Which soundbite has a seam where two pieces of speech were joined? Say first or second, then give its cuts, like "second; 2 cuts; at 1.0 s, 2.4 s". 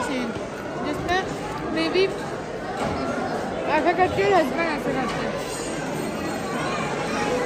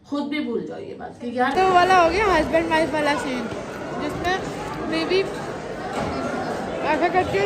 second; 1 cut; at 1.5 s